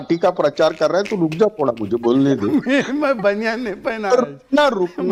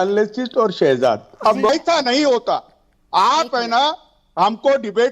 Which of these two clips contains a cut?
second; 1 cut; at 1.7 s

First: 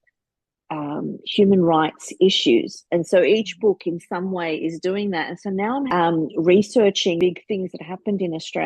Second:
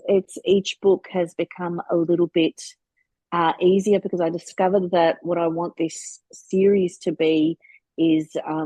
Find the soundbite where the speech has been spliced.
first; 2 cuts; at 5.9 s, 7.2 s

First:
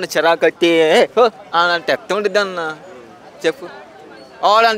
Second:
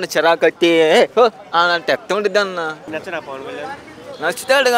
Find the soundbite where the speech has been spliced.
second; 1 cut; at 2.9 s

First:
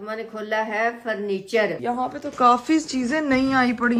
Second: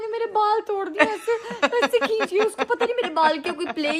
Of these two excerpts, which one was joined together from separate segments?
first; 1 cut; at 1.7 s

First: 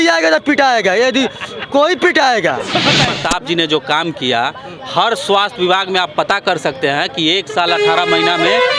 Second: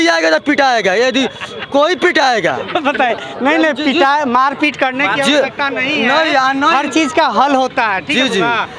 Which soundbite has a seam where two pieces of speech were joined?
first; 1 cut; at 3.1 s

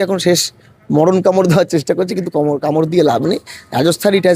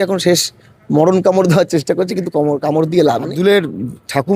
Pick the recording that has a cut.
second; 1 cut; at 3.3 s

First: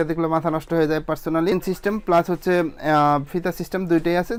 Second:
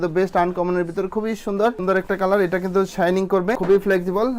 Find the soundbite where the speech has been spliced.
second; 2 cuts; at 1.8 s, 3.6 s

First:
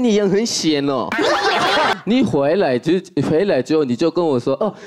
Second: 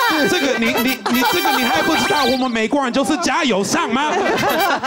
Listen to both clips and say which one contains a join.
first; 1 cut; at 1.9 s

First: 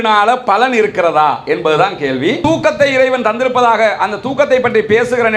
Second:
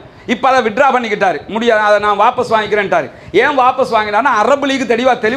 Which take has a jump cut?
first; 1 cut; at 2.4 s

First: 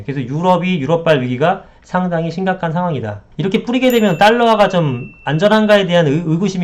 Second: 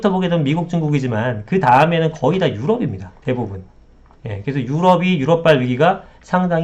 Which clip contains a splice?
first; 1 cut; at 3.2 s

